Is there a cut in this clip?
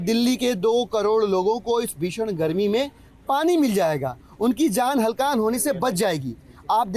no; 0 cuts

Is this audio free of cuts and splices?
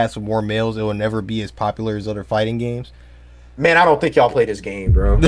yes; 0 cuts

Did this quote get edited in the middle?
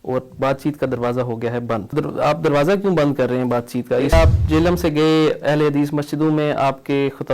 yes; 2 cuts; at 1.9 s, 4.1 s

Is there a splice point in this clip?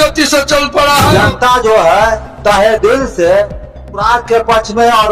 yes; 1 cut; at 1.1 s

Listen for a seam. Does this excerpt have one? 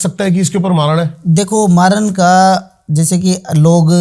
no; 0 cuts

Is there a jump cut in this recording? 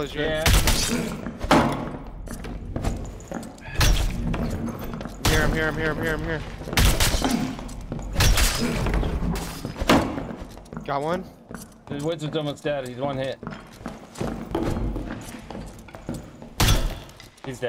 no; 0 cuts

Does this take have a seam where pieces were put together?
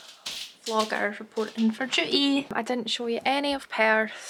no; 0 cuts

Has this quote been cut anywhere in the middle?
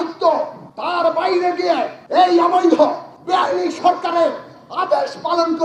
no; 0 cuts

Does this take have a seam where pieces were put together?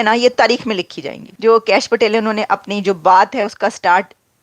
no; 0 cuts

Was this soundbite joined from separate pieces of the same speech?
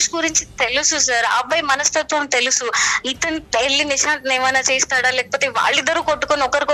no; 0 cuts

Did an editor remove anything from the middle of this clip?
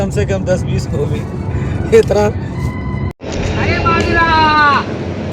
yes; 1 cut; at 3.1 s

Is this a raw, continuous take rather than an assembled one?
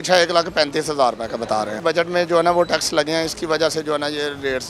no; 1 cut; at 1.8 s

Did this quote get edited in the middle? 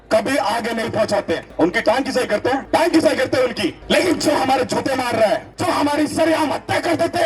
yes; 4 cuts; at 1.5 s, 2.6 s, 3.8 s, 5.5 s

